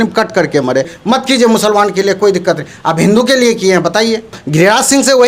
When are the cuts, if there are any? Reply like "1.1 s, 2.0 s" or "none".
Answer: 1.0 s, 4.4 s